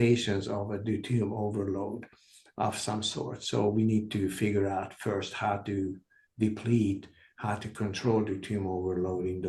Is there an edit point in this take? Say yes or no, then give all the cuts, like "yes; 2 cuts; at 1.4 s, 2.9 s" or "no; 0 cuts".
no; 0 cuts